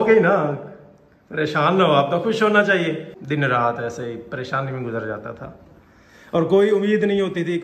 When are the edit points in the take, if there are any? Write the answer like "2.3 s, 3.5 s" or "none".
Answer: 3.1 s